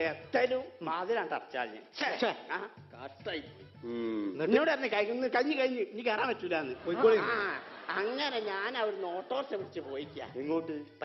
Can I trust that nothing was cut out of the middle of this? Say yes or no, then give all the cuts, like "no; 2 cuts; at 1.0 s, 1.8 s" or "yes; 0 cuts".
no; 1 cut; at 1.9 s